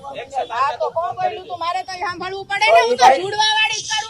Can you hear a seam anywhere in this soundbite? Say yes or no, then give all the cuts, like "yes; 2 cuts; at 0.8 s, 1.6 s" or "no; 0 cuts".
no; 0 cuts